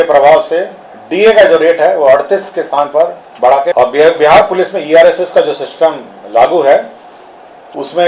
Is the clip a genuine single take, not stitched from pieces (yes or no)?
no